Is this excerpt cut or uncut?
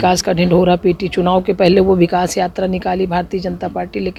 uncut